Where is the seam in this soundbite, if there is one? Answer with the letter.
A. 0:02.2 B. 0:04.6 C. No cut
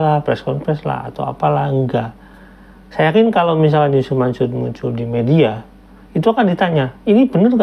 C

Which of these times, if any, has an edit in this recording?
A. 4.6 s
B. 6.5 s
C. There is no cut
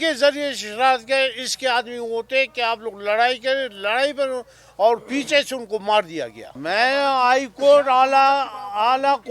C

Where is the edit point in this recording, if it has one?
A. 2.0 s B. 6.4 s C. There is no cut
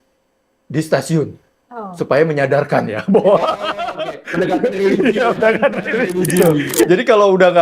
B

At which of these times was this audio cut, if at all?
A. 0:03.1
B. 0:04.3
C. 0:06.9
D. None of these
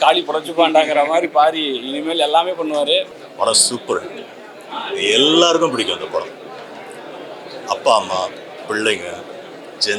A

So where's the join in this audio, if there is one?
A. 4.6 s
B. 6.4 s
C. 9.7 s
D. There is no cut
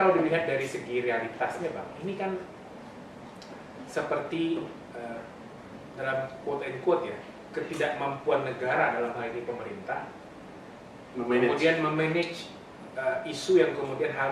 D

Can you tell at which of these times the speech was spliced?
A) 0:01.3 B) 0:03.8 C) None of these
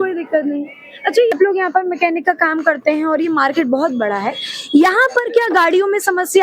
A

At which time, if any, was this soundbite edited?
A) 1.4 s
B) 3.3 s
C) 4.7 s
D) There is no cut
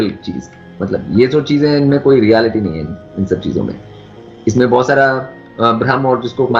D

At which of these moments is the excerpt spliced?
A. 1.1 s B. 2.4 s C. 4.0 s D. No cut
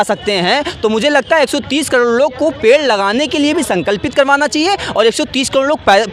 D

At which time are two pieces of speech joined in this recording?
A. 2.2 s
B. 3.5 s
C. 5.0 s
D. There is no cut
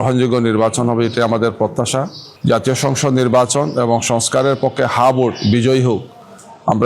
A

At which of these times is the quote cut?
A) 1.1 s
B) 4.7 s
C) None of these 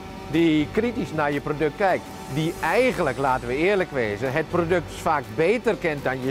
A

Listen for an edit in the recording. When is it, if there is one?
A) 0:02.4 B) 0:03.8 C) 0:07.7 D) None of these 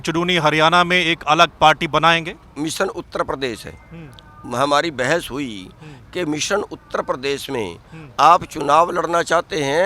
A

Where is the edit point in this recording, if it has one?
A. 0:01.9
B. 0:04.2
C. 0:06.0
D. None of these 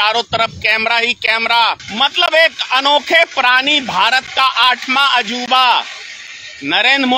A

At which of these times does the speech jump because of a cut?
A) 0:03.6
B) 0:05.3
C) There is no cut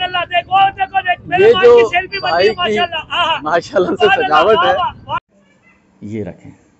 B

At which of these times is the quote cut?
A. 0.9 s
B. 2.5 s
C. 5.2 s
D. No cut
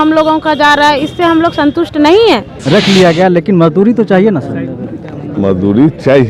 B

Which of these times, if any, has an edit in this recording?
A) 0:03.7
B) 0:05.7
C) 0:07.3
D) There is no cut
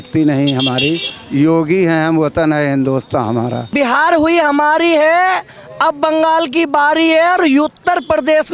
A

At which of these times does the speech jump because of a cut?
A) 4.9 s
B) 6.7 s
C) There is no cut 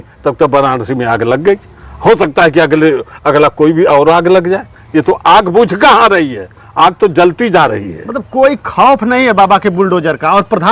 C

